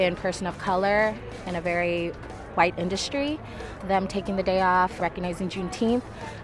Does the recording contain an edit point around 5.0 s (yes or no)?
yes